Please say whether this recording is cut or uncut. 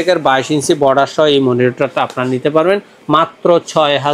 uncut